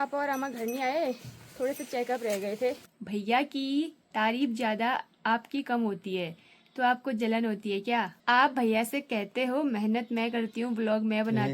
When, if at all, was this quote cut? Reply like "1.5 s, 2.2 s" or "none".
2.9 s, 8.1 s